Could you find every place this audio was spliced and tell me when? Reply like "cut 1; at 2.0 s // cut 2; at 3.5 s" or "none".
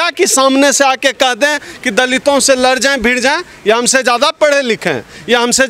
none

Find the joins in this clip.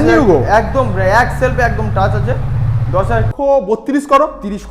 cut 1; at 3.3 s

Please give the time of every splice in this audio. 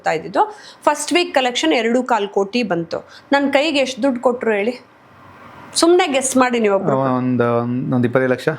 none

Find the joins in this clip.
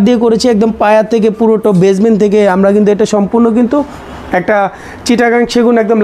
none

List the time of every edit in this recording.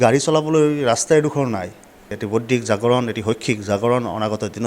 cut 1; at 2.2 s

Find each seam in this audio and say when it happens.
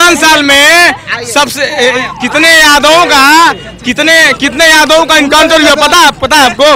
none

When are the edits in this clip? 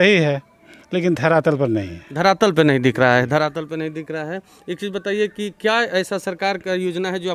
none

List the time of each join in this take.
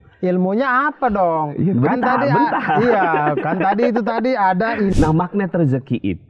cut 1; at 4.9 s

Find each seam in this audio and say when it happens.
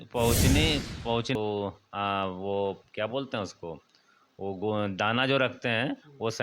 cut 1; at 1.3 s

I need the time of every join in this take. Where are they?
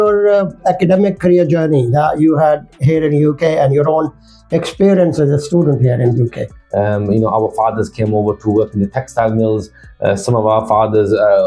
cut 1; at 6.5 s

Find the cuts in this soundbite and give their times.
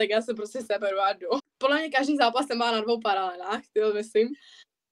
cut 1; at 1.5 s

